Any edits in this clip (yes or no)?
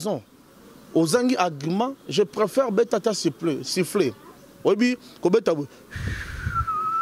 no